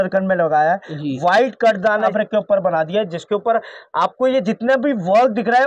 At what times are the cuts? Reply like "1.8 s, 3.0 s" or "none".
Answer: 2.1 s